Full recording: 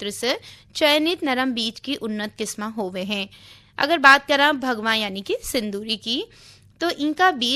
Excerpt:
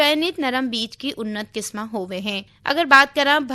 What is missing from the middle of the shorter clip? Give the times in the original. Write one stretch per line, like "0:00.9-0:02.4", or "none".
0:03.3-0:03.6